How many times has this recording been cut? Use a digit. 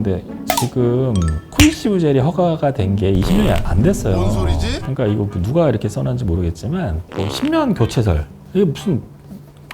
1